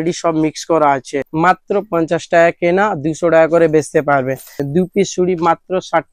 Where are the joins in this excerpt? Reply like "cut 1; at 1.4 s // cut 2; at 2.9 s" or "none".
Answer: cut 1; at 1.1 s // cut 2; at 4.6 s